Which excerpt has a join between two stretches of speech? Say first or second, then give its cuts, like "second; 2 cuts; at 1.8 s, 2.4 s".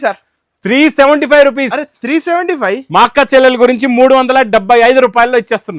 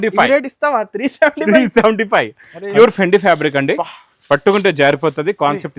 second; 1 cut; at 2.7 s